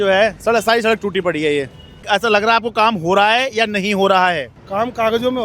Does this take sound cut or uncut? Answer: cut